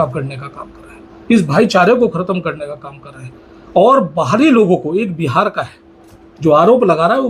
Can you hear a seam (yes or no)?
no